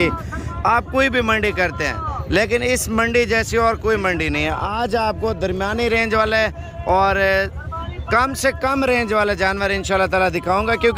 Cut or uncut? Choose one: uncut